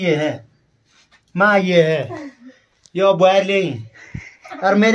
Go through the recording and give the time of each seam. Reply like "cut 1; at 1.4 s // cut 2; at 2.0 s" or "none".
none